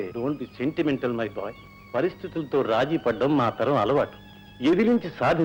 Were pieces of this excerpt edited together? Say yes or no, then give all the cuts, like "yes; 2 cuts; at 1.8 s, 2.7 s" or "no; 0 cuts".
no; 0 cuts